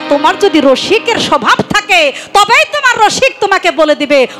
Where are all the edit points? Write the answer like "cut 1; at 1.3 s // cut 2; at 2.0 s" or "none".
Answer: none